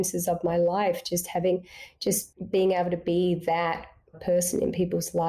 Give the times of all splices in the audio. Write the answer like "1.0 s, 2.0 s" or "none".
2.3 s, 4.2 s

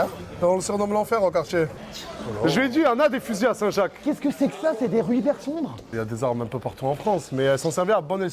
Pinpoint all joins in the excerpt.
1.8 s, 5.8 s

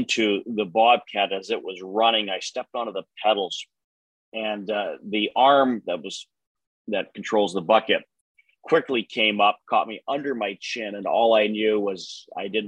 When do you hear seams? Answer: none

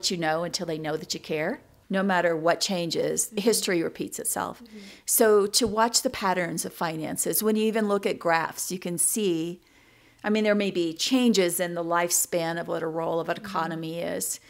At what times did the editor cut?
1.7 s

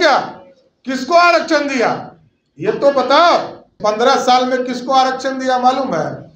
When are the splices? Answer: 3.7 s

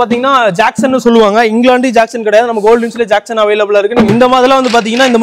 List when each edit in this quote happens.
4.1 s

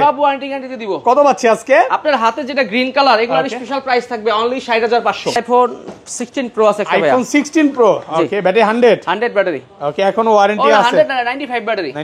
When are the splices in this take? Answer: 5.4 s

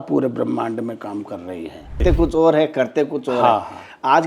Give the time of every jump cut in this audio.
2.0 s

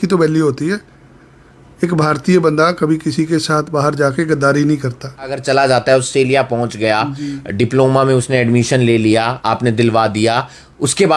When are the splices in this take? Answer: 5.4 s

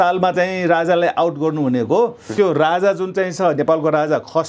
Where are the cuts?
2.3 s

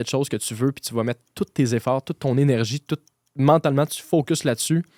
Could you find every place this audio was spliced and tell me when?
none

